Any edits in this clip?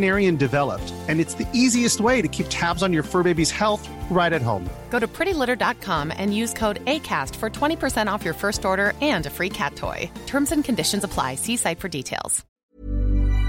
yes; 1 cut; at 12.4 s

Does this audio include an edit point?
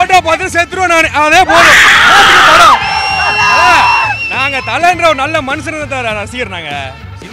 no; 0 cuts

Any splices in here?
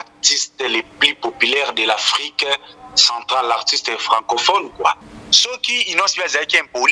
yes; 1 cut; at 5.1 s

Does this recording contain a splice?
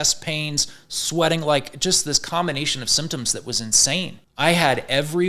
yes; 1 cut; at 4.2 s

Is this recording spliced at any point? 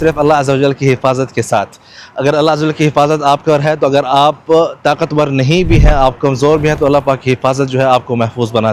no; 0 cuts

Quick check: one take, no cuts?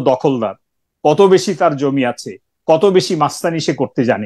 yes; 0 cuts

